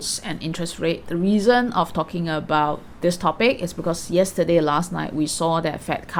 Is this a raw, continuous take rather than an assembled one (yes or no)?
yes